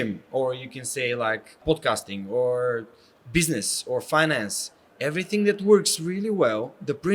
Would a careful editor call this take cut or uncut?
cut